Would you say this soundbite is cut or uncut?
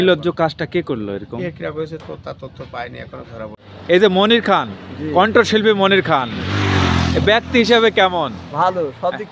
cut